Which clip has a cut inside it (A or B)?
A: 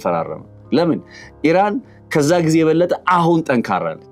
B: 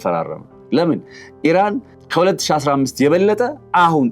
B